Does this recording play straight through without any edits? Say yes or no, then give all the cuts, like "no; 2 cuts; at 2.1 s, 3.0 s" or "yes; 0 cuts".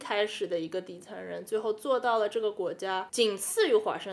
no; 1 cut; at 3.1 s